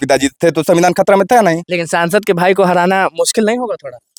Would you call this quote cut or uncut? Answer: uncut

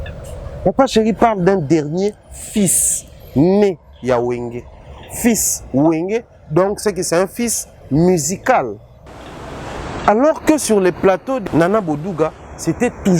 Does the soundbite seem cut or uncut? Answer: cut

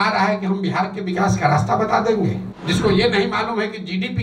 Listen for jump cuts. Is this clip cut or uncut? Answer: cut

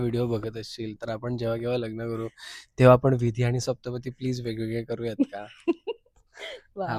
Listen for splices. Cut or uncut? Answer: uncut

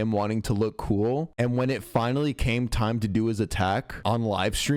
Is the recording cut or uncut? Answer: uncut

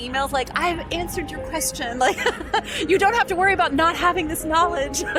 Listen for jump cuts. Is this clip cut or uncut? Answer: uncut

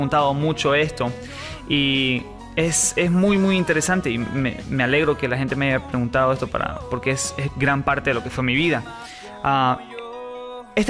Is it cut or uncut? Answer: uncut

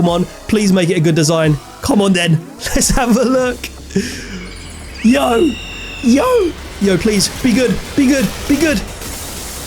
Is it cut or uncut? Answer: cut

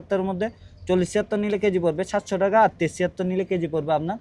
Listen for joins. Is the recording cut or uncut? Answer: uncut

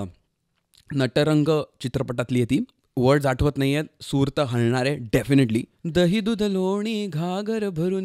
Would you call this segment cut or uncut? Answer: cut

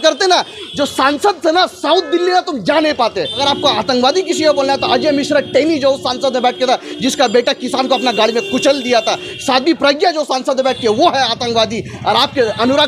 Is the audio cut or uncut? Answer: cut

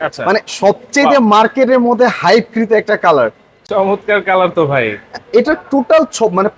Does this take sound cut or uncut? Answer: uncut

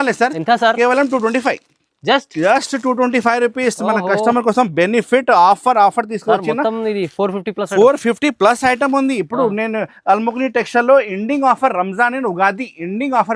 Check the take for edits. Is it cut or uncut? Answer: uncut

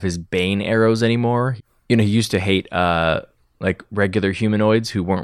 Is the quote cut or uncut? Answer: uncut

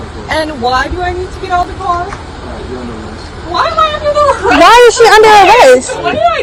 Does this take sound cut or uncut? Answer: uncut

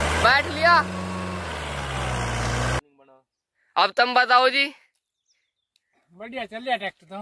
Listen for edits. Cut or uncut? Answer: cut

